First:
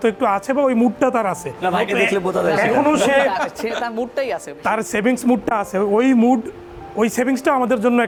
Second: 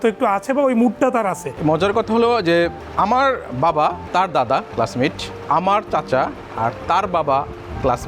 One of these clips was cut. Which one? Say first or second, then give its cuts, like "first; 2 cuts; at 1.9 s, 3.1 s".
second; 4 cuts; at 1.5 s, 2.8 s, 4.0 s, 5.3 s